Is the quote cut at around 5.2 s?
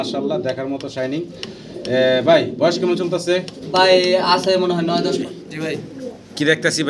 yes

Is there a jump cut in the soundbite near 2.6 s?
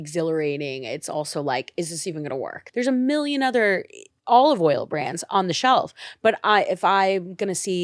yes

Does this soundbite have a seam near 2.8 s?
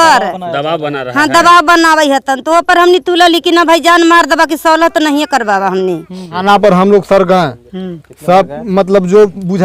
no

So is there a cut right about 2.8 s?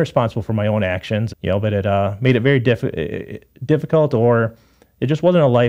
no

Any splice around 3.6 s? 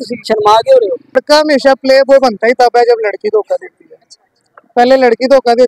no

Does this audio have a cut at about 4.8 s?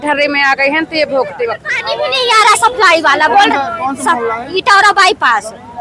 no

